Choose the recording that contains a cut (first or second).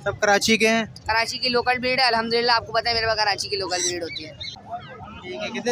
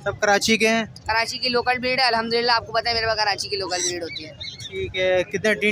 first